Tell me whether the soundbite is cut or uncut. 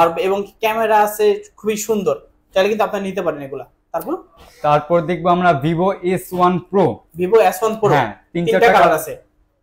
uncut